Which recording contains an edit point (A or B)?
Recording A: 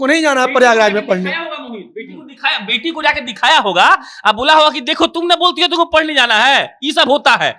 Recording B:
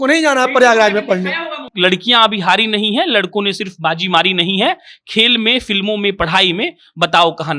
B